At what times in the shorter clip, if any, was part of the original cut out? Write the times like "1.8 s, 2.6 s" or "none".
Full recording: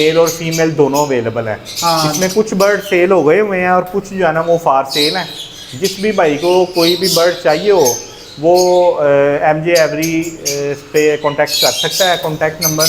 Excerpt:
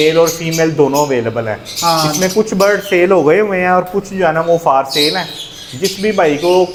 none